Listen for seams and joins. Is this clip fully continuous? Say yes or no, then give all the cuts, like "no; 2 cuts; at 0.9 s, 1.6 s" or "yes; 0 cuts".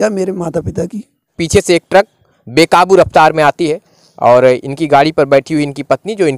no; 1 cut; at 1.3 s